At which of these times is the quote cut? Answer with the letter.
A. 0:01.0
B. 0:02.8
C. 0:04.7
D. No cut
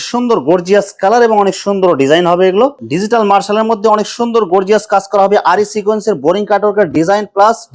B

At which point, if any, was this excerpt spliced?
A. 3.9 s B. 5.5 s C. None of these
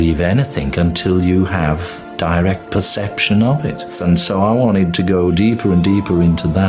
A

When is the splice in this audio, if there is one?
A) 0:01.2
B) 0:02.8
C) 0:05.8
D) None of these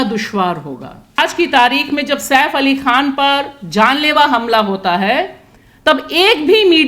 A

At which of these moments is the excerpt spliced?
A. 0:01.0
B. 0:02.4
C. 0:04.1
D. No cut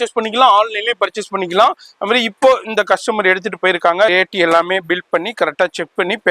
C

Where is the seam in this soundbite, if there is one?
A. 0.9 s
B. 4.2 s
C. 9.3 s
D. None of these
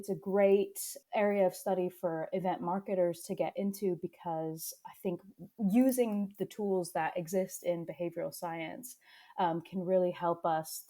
A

